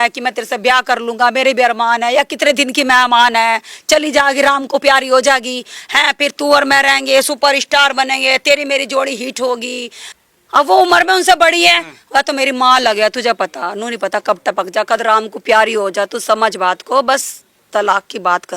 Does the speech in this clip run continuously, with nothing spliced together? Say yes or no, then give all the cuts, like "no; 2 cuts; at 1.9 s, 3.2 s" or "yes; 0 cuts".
no; 1 cut; at 10.1 s